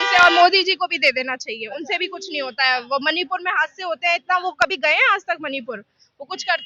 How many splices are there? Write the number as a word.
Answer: zero